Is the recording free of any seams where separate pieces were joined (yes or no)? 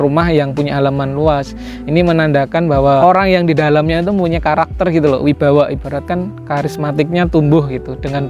no